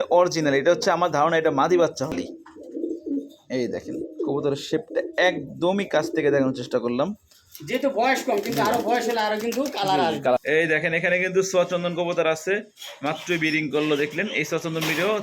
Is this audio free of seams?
no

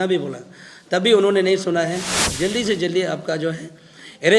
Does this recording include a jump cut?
yes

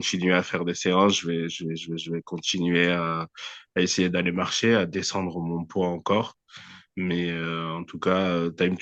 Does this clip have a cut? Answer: no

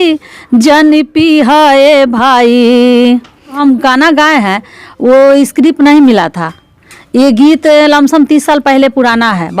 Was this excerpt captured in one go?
no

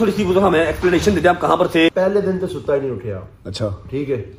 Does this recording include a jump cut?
yes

